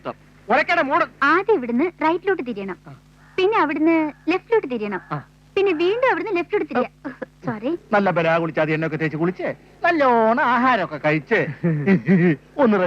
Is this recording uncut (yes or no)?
no